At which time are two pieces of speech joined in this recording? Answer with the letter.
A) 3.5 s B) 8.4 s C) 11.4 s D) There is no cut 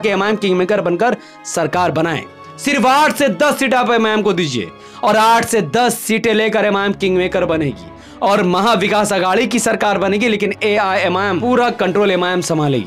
C